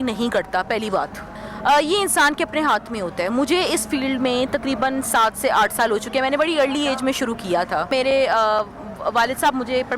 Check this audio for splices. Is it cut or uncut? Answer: cut